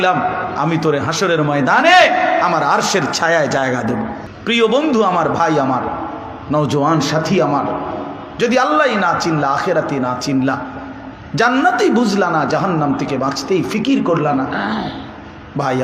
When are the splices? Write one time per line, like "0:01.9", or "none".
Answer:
0:04.3